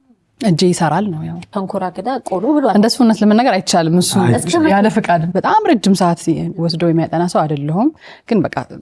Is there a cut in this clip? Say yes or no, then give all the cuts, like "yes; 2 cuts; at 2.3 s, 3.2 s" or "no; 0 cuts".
yes; 2 cuts; at 1.5 s, 5.3 s